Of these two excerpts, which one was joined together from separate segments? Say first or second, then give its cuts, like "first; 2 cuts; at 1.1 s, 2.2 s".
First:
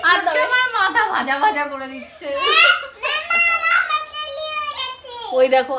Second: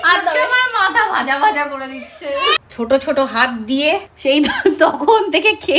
second; 2 cuts; at 2.6 s, 4.1 s